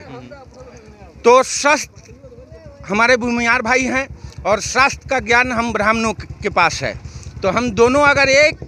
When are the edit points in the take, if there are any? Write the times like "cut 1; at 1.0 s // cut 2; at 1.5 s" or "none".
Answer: none